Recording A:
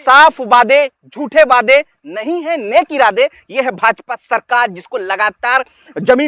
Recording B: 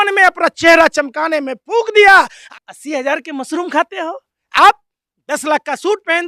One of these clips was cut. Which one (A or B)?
B